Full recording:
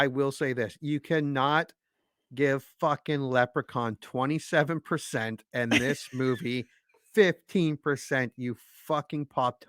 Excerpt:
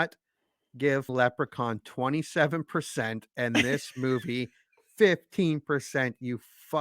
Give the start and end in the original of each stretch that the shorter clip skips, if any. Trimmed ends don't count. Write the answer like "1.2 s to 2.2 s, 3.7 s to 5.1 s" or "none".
2.7 s to 3.2 s